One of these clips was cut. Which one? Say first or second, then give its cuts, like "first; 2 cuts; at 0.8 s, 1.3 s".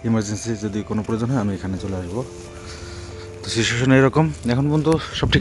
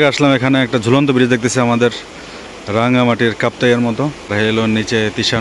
second; 1 cut; at 4.3 s